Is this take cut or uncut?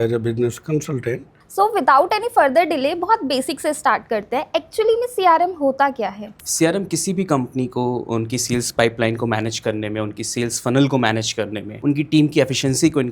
cut